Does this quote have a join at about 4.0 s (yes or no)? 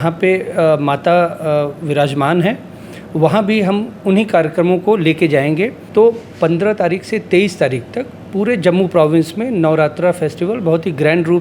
no